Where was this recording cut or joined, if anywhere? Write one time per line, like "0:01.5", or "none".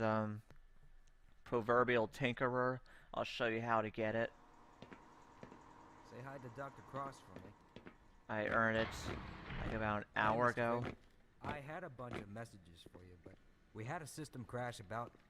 0:11.9